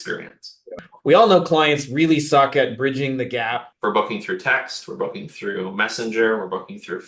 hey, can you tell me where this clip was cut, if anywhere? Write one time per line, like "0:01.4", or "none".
0:00.9
0:03.7